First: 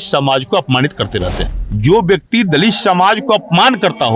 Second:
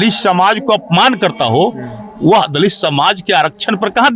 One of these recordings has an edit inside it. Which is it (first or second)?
first